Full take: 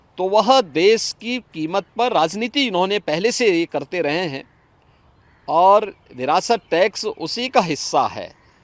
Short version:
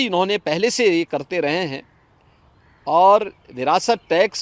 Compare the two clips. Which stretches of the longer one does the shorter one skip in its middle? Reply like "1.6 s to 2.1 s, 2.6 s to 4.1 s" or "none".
none